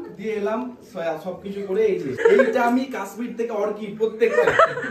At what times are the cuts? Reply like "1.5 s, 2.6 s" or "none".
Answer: 2.2 s